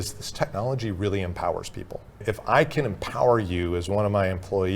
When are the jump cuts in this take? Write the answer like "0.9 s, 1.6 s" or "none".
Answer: 2.2 s